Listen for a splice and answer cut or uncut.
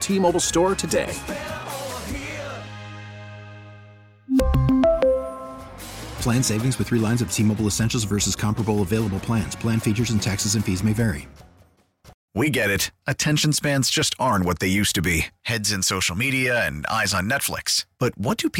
cut